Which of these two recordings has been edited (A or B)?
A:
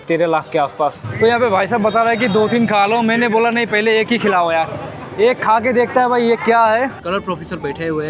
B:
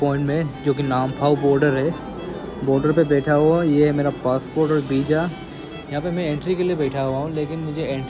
A